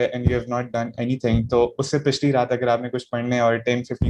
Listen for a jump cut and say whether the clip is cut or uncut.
uncut